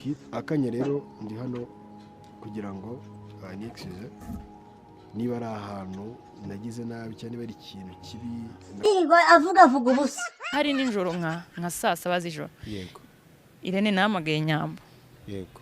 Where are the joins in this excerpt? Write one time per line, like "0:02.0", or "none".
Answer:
0:08.8